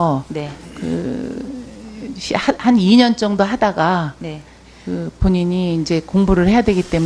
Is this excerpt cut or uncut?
uncut